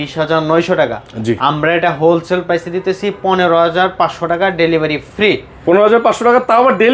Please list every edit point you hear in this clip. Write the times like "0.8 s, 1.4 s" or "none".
none